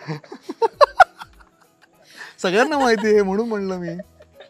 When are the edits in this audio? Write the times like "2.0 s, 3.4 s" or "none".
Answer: none